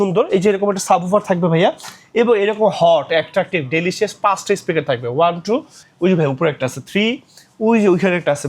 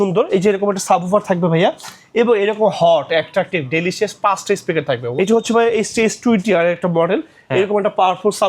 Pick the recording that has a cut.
second; 1 cut; at 5.1 s

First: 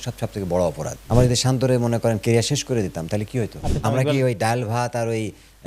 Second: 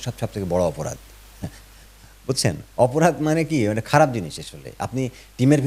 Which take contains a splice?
first; 2 cuts; at 0.9 s, 3.6 s

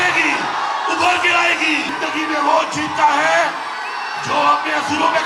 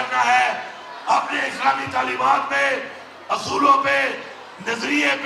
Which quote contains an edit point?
first; 1 cut; at 1.9 s

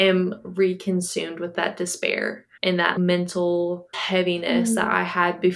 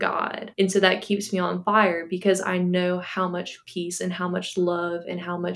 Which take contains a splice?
first; 3 cuts; at 1.5 s, 2.9 s, 4.0 s

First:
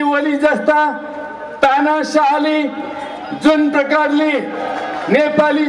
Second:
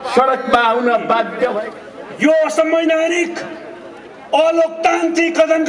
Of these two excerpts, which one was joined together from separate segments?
second; 1 cut; at 1.6 s

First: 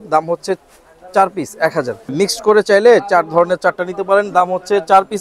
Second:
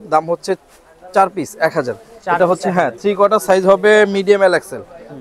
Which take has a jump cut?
first; 1 cut; at 2.1 s

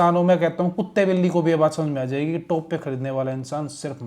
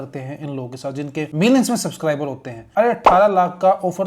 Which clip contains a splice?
second; 2 cuts; at 1.3 s, 2.6 s

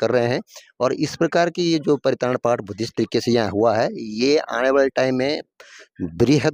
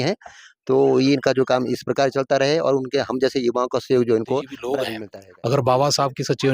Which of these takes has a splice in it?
second; 1 cut; at 4.8 s

